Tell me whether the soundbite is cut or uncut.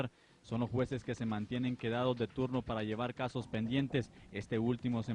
uncut